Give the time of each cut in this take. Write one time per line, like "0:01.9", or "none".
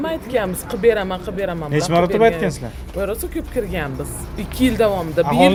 none